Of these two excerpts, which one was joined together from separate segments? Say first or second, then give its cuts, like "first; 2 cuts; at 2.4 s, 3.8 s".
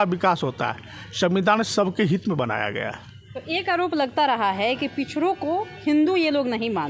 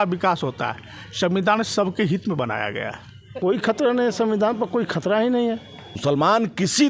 second; 2 cuts; at 3.3 s, 6.0 s